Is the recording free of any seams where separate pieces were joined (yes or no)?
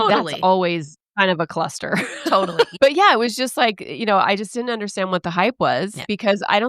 no